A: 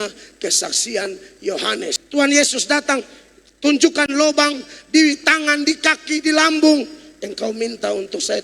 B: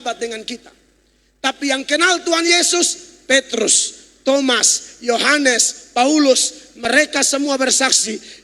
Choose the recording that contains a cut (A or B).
A